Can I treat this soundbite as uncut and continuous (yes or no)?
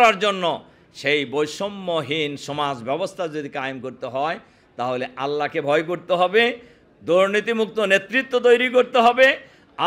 yes